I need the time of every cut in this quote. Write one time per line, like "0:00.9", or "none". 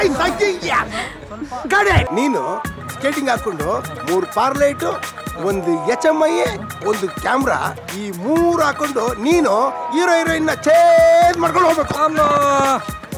0:02.1